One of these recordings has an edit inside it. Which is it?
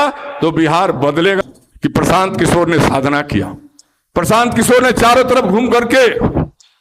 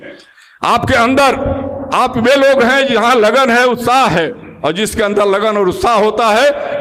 first; 1 cut; at 1.4 s

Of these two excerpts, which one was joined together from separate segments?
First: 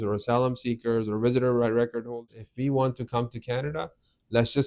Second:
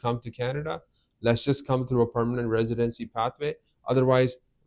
first; 1 cut; at 2.1 s

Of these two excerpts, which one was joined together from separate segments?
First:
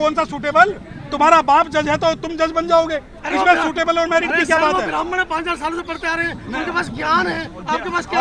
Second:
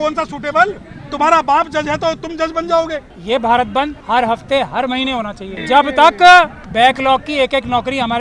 second; 4 cuts; at 3.1 s, 4.0 s, 5.5 s, 6.6 s

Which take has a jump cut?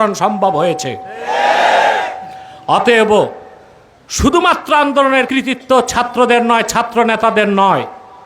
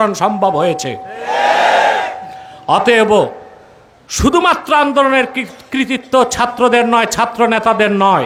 first; 1 cut; at 5.3 s

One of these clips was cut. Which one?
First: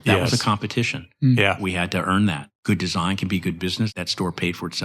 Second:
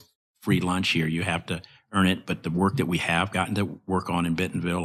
first; 2 cuts; at 2.5 s, 3.9 s

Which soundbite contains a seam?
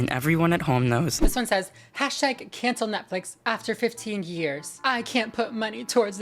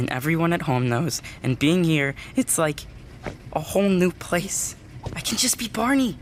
first; 1 cut; at 1.2 s

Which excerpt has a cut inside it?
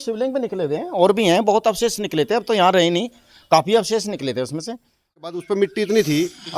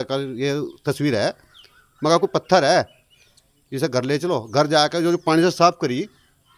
first; 1 cut; at 5.2 s

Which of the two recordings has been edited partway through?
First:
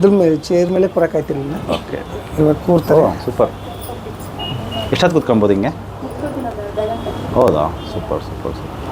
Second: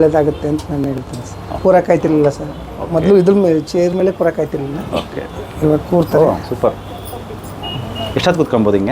second; 1 cut; at 1.6 s

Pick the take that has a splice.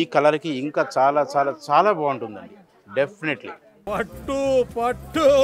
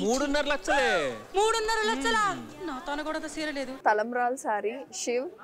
second; 1 cut; at 3.7 s

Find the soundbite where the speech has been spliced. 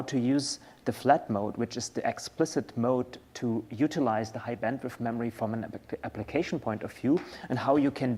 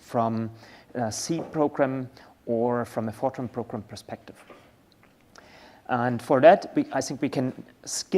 second; 1 cut; at 2.9 s

